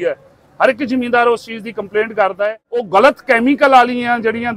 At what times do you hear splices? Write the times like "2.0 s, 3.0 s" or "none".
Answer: 2.9 s